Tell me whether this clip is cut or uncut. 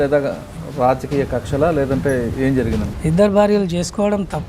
cut